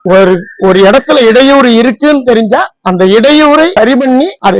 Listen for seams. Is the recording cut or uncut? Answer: uncut